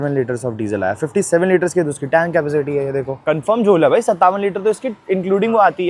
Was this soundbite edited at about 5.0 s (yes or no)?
no